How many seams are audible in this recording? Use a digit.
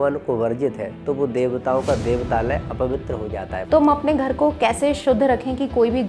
1